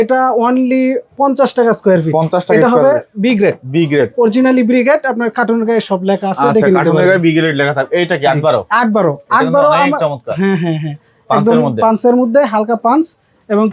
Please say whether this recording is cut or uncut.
uncut